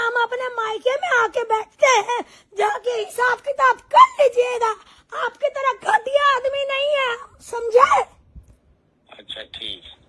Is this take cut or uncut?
uncut